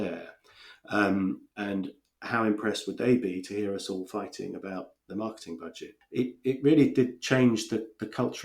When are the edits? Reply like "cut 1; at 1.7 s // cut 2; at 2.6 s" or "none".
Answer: cut 1; at 5.9 s